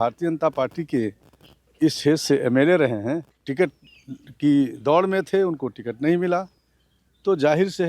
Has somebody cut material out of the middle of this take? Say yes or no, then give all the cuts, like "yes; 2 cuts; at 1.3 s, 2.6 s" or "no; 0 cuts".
yes; 1 cut; at 3.4 s